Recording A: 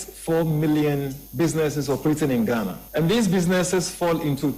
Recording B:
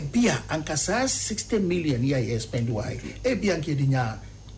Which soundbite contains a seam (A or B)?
A